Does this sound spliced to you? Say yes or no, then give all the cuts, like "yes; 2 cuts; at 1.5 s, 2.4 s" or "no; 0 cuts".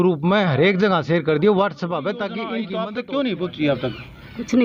yes; 1 cut; at 2.6 s